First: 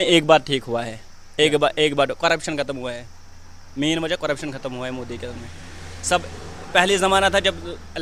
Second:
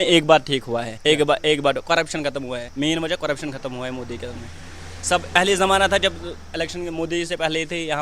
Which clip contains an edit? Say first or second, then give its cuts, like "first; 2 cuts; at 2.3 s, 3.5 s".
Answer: second; 3 cuts; at 0.9 s, 2.7 s, 5.4 s